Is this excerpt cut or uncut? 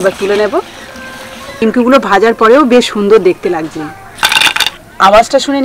cut